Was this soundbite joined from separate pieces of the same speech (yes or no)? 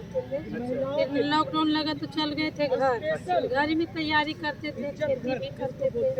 no